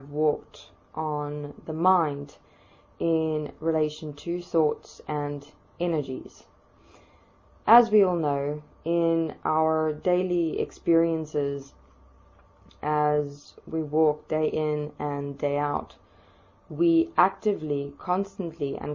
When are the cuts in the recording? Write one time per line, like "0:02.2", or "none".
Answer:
0:04.7